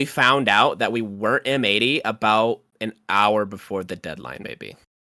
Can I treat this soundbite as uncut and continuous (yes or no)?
yes